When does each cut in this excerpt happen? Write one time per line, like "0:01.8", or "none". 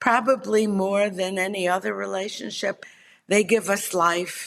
0:02.8